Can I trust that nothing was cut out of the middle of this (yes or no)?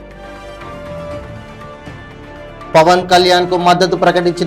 no